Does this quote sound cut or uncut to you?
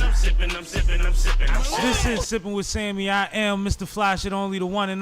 cut